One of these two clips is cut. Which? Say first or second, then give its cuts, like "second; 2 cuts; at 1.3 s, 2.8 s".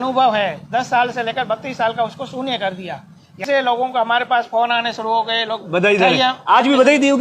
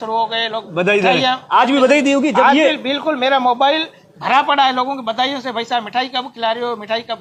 first; 1 cut; at 3.4 s